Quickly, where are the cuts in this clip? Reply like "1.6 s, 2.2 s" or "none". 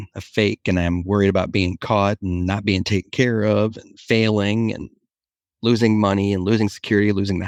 none